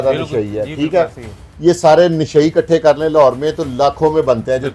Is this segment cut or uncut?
uncut